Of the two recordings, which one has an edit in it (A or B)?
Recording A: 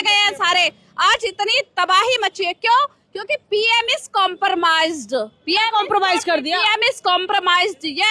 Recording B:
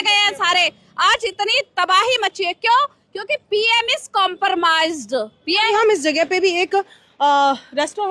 B